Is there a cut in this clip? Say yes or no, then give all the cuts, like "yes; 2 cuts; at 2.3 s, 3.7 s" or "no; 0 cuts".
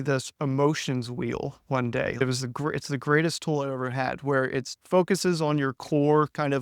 yes; 2 cuts; at 2.2 s, 4.8 s